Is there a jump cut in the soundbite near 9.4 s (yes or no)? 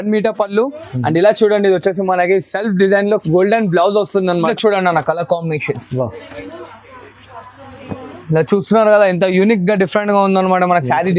no